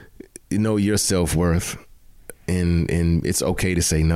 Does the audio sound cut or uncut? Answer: uncut